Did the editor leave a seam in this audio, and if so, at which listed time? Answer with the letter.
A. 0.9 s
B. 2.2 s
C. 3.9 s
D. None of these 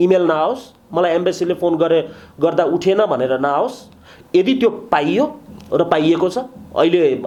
D